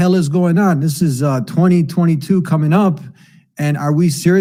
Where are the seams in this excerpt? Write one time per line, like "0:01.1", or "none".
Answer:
none